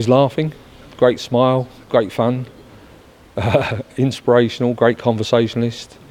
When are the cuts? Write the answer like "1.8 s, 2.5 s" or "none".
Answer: none